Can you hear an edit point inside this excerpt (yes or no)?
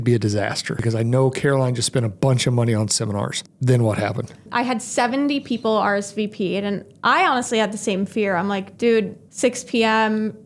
yes